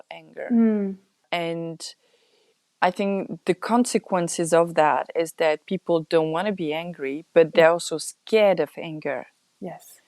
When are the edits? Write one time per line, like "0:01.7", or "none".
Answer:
0:01.2